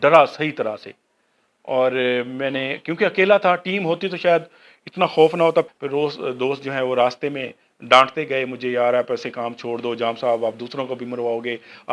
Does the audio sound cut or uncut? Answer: cut